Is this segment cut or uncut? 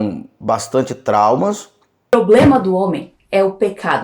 cut